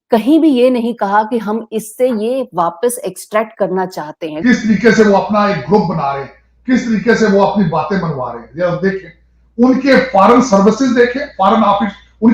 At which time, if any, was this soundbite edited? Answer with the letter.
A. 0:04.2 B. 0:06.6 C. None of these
A